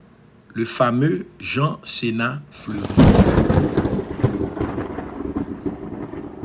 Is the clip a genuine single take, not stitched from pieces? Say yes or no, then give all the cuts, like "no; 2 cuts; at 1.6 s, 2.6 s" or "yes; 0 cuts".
no; 1 cut; at 2.8 s